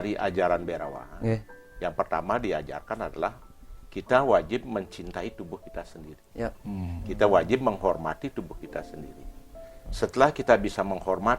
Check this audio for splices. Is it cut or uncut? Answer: uncut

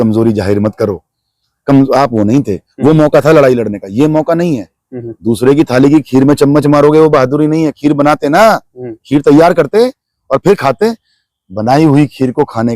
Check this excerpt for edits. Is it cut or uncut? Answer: uncut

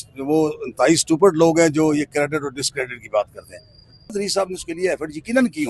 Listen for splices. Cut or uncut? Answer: cut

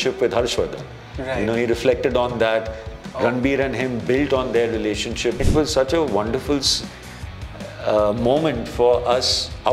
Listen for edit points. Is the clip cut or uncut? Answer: cut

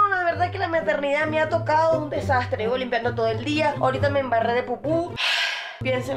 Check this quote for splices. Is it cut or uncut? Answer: uncut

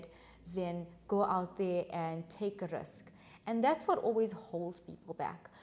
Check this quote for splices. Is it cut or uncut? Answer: uncut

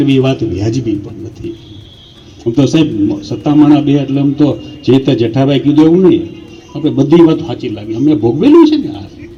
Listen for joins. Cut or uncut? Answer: uncut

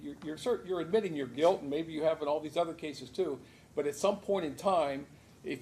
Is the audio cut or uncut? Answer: uncut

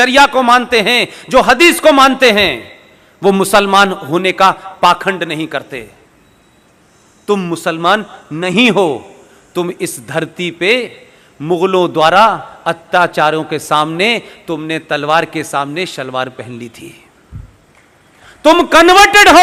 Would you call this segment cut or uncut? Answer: uncut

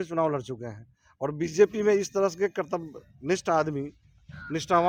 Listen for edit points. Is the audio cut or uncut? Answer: uncut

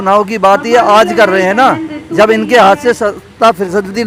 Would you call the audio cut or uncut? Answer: uncut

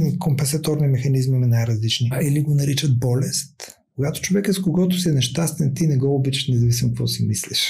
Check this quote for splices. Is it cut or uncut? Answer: cut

